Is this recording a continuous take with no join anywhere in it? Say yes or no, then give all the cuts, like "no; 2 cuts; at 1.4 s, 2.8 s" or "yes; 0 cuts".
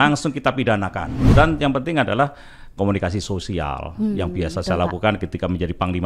no; 1 cut; at 1.1 s